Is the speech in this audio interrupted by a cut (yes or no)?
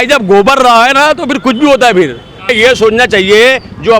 yes